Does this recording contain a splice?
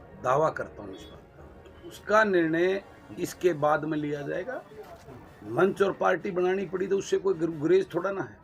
yes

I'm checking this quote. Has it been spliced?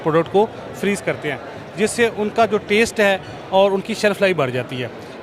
no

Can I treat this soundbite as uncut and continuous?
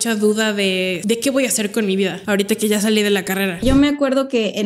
no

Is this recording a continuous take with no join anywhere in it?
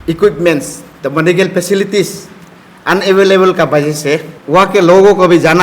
no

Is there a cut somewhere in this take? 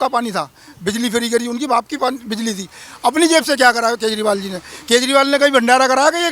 no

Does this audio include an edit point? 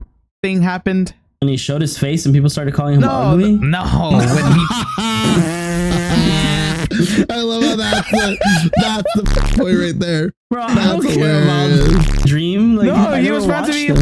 yes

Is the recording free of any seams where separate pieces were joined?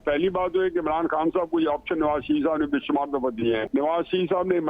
no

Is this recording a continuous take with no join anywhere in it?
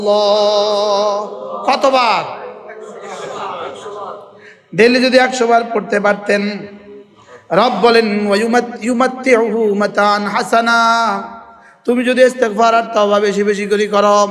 yes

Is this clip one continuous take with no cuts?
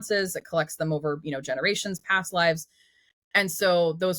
yes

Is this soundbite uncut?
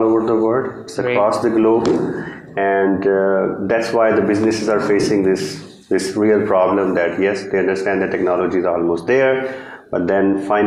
yes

